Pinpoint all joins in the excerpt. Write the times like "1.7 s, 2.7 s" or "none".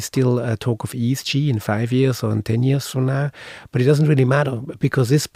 none